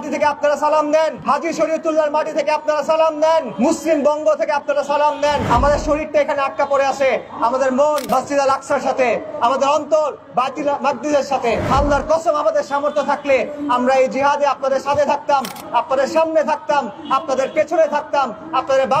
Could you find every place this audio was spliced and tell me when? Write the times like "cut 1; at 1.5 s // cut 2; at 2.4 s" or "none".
cut 1; at 1.2 s // cut 2; at 3.5 s // cut 3; at 5.5 s // cut 4; at 8.0 s // cut 5; at 11.7 s